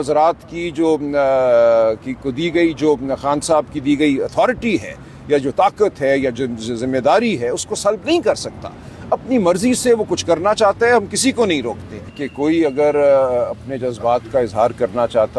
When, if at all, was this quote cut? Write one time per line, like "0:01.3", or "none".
0:12.2